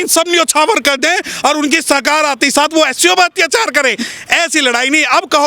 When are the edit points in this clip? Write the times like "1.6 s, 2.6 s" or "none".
none